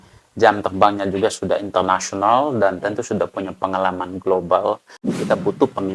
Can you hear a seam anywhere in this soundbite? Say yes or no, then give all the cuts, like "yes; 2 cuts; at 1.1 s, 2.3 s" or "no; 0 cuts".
yes; 1 cut; at 5.0 s